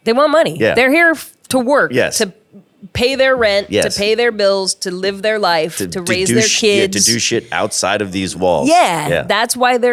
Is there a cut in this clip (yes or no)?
no